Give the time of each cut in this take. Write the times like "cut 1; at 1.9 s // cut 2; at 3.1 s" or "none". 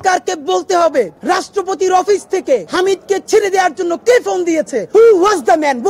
cut 1; at 1.1 s // cut 2; at 2.7 s // cut 3; at 4.8 s